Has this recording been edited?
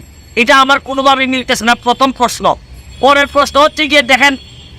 no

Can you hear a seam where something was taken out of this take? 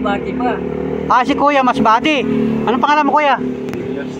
no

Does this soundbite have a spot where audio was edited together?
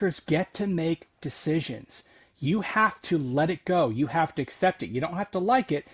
no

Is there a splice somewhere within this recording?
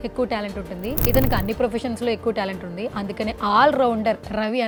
no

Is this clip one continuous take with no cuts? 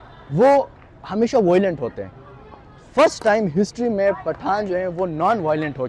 yes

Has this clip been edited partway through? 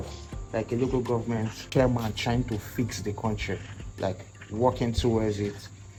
no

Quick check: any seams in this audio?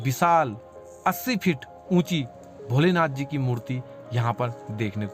no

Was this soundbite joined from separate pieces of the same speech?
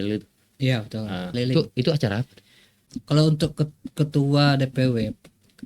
yes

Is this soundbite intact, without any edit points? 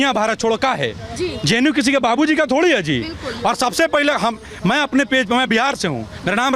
yes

